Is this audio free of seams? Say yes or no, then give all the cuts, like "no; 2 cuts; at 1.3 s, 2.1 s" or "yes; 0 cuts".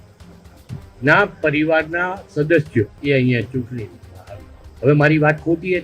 no; 1 cut; at 2.9 s